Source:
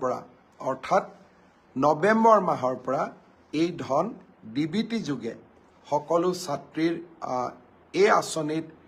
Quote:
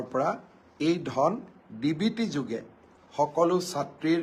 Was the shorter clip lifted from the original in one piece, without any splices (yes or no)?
yes